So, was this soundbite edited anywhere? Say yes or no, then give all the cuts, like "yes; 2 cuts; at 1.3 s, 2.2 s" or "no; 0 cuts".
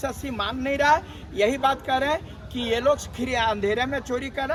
no; 0 cuts